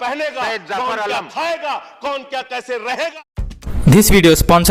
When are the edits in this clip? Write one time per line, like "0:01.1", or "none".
0:03.1